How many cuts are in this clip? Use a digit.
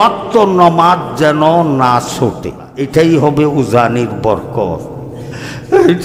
1